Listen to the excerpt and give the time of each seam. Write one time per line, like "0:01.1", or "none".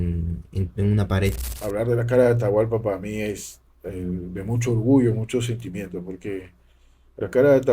0:01.7

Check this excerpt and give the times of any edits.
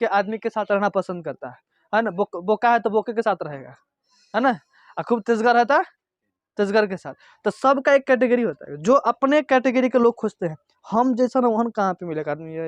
none

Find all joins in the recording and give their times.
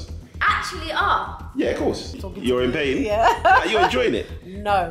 0:02.1

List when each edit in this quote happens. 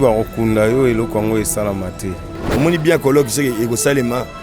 0:02.4

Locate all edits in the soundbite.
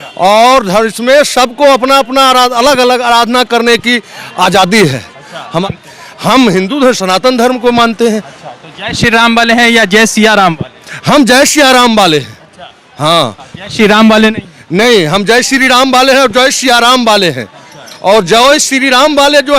0:05.7

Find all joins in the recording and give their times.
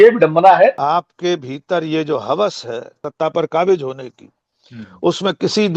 0:00.8
0:03.0

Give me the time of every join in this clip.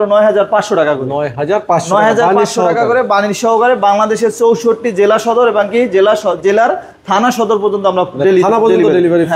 none

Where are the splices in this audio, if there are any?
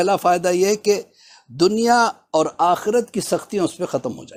none

